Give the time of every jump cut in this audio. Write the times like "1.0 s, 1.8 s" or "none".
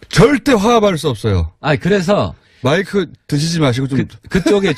2.2 s